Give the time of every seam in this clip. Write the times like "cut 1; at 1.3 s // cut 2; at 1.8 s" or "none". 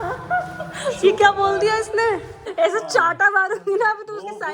cut 1; at 2.4 s